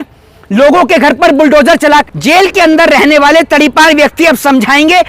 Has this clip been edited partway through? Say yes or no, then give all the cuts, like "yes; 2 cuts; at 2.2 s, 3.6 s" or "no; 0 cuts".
yes; 1 cut; at 2.1 s